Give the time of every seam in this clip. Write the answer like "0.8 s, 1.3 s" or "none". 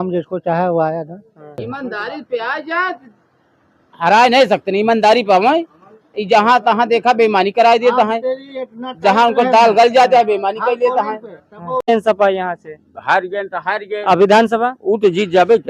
1.6 s, 11.8 s